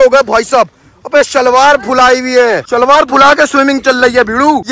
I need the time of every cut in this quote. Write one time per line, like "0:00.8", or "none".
none